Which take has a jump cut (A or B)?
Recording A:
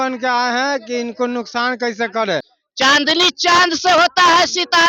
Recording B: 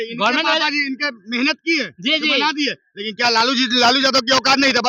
A